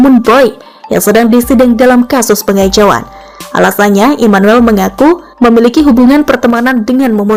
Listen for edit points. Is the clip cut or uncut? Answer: uncut